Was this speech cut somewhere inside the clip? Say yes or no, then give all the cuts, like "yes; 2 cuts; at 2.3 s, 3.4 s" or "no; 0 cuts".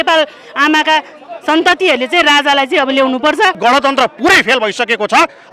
yes; 1 cut; at 3.6 s